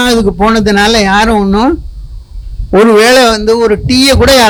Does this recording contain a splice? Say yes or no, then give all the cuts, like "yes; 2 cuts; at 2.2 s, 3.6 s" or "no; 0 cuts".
no; 0 cuts